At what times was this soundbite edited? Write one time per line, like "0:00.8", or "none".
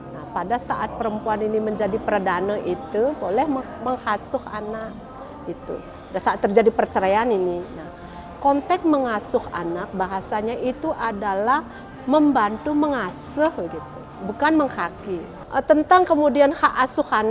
0:15.4